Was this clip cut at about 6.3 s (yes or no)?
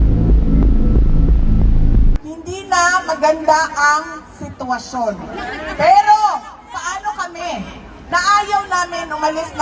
no